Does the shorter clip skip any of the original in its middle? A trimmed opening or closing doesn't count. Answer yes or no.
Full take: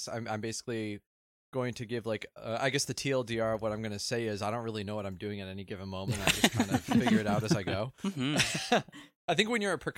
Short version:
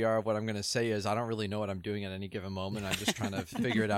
no